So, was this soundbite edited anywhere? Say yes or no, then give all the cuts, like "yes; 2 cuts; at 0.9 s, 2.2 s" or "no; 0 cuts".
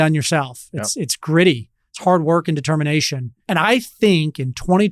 yes; 1 cut; at 3.4 s